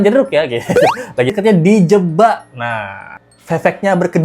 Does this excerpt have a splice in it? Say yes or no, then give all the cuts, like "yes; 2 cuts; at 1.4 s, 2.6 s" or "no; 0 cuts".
yes; 1 cut; at 1.3 s